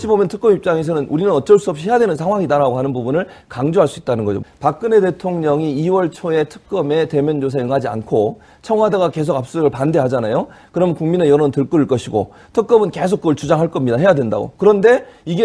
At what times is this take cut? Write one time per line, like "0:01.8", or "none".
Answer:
0:01.8